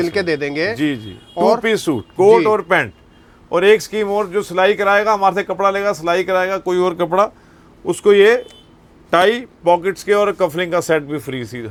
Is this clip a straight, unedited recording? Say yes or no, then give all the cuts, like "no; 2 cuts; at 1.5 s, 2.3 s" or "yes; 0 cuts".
yes; 0 cuts